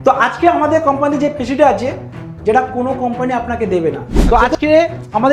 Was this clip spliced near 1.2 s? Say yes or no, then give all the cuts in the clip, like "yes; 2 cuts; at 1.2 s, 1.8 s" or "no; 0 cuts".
no; 1 cut; at 4.2 s